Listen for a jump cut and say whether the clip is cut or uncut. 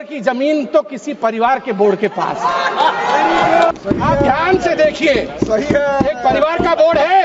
cut